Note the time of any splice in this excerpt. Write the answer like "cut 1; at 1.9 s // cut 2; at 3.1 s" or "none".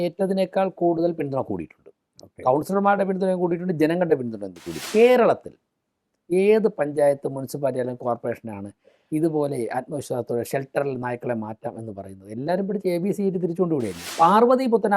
cut 1; at 4.8 s // cut 2; at 14.0 s